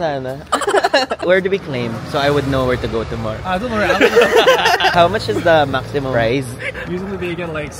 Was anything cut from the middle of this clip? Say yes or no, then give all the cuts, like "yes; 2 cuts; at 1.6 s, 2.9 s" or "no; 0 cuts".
yes; 2 cuts; at 1.2 s, 4.9 s